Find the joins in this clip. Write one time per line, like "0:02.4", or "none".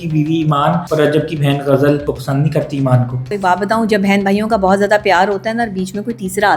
0:00.8
0:02.1
0:03.2